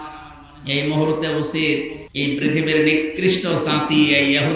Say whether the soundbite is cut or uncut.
cut